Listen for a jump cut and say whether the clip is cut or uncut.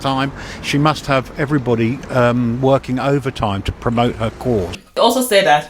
cut